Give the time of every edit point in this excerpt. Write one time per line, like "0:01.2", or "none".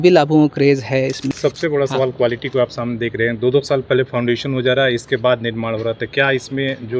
0:01.3